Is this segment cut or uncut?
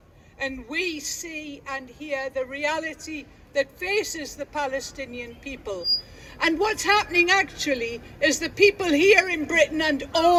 uncut